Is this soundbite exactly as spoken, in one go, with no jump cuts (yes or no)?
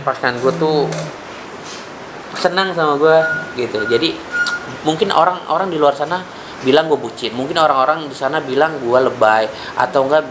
yes